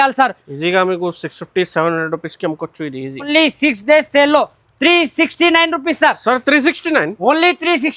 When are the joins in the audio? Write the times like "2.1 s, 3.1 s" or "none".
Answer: 3.3 s